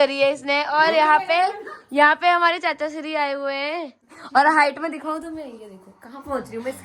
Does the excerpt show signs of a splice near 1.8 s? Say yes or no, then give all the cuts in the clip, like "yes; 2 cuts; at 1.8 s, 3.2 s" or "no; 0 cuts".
no; 1 cut; at 4.0 s